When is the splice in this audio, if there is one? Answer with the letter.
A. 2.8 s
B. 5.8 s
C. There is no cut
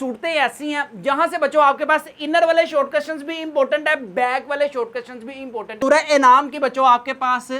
B